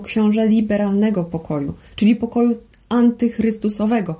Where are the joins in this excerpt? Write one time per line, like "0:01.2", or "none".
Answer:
none